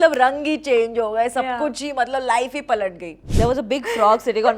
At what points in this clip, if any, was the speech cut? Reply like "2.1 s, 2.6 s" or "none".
3.2 s